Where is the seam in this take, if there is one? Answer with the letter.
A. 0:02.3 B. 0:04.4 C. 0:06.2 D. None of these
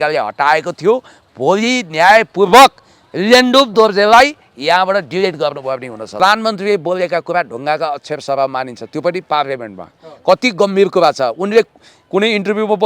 C